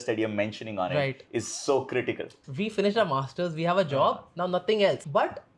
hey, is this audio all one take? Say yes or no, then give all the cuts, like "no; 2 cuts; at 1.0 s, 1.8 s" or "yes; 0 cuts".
no; 1 cut; at 2.4 s